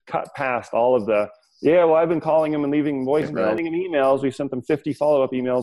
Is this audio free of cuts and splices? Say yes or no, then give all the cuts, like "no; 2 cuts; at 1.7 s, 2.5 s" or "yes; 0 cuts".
no; 1 cut; at 3.5 s